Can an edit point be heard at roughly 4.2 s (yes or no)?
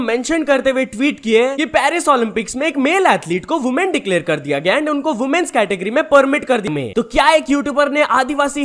no